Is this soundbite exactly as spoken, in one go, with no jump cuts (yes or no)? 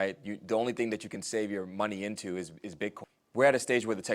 no